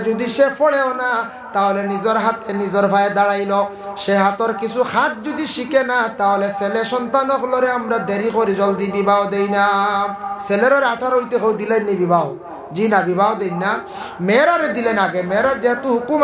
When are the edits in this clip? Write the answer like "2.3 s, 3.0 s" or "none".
none